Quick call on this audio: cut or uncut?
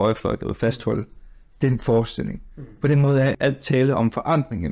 cut